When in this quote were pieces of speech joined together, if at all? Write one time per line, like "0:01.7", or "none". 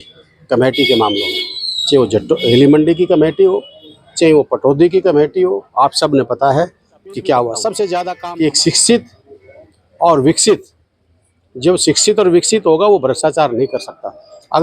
0:08.1